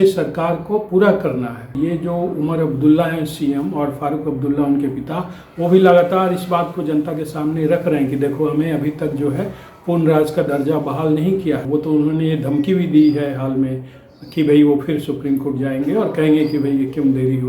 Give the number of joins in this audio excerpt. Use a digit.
2